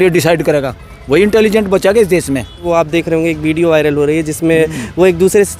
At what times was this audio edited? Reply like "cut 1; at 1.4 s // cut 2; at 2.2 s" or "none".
cut 1; at 2.6 s